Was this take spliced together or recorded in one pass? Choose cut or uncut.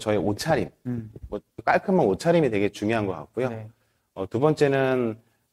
cut